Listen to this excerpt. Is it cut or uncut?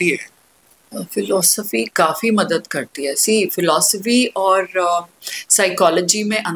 uncut